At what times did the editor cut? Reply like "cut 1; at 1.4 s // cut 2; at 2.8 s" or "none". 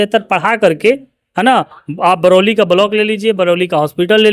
none